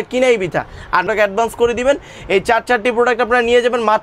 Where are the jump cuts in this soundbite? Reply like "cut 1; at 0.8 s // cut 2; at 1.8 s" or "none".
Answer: cut 1; at 1.0 s